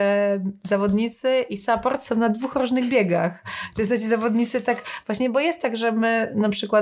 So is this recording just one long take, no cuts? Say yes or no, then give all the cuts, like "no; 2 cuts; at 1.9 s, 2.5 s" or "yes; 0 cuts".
yes; 0 cuts